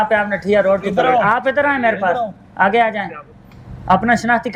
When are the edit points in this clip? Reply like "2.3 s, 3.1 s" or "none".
none